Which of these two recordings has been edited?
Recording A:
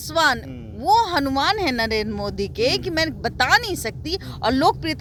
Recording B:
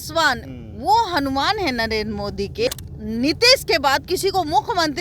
B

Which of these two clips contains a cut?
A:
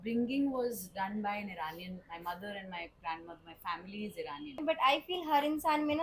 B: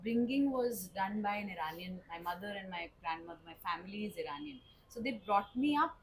A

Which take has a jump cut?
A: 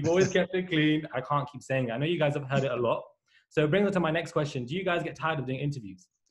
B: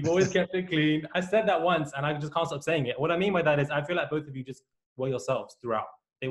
A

